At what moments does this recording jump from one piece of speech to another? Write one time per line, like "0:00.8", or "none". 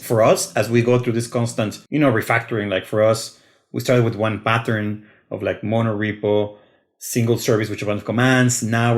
0:01.8